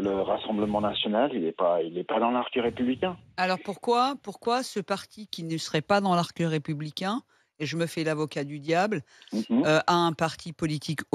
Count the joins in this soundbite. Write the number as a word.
zero